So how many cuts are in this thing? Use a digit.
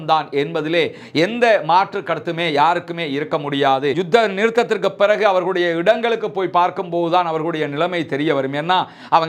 1